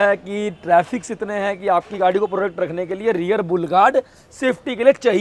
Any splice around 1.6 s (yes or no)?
no